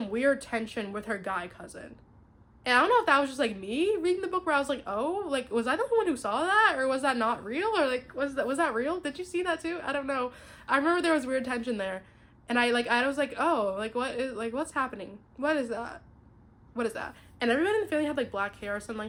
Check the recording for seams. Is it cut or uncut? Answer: uncut